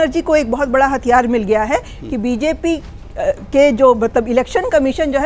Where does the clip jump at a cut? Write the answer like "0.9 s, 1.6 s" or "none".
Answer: none